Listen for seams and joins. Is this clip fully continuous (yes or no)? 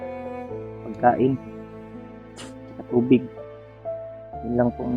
no